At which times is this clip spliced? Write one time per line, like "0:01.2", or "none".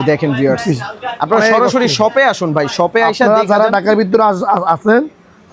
none